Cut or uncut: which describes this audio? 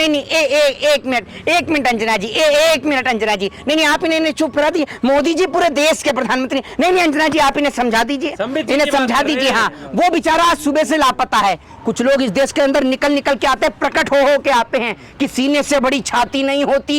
cut